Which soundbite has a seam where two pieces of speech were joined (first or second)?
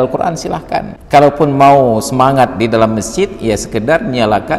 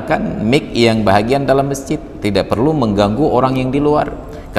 first